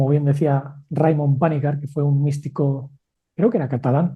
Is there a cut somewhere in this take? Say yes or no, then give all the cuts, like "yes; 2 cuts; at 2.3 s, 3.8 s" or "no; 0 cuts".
no; 0 cuts